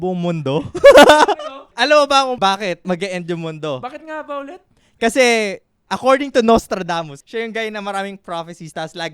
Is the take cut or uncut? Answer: cut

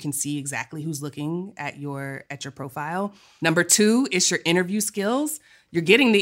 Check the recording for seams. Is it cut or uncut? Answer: cut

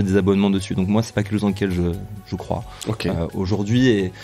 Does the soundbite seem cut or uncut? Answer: uncut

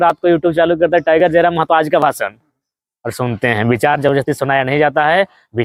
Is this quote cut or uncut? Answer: uncut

